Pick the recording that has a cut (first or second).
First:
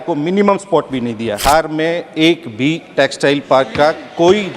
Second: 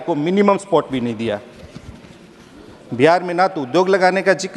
first